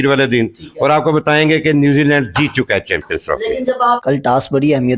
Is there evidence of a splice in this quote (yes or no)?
yes